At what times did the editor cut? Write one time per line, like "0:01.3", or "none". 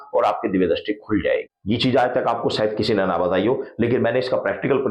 0:01.5